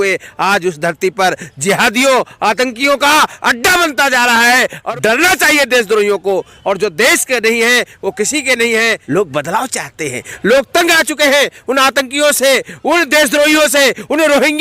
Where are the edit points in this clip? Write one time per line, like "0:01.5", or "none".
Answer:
0:04.8
0:09.0

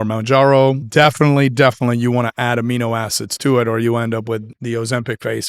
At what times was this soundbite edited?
0:00.8
0:04.5

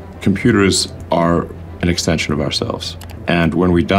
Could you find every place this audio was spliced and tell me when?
0:00.9
0:03.2

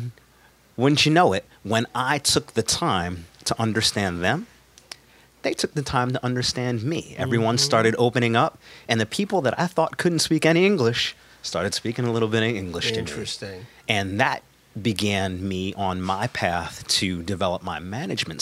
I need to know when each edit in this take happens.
none

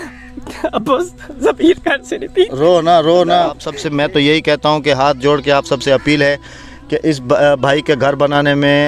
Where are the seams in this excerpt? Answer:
0:03.7

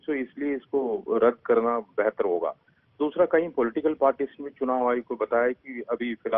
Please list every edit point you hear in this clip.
0:05.2

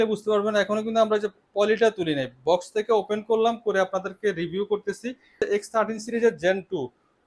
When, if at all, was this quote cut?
0:05.3

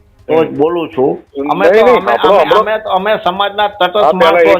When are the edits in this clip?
0:01.3

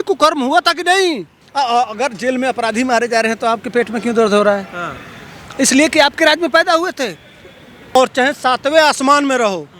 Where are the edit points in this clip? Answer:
0:01.4
0:08.0

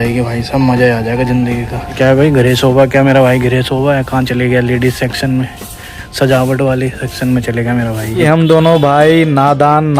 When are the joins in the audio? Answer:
0:01.9
0:08.2

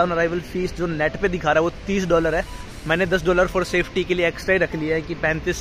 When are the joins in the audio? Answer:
none

